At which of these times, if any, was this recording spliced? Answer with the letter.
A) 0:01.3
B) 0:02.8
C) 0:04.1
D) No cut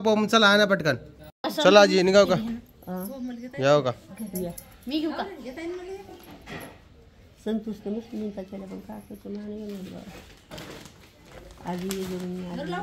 A